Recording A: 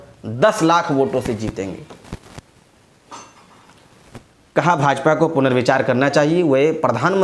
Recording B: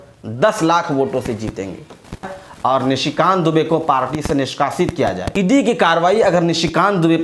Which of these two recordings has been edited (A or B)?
B